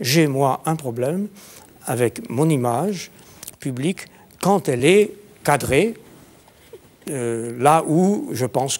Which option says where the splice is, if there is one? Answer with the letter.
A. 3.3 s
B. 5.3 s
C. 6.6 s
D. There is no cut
D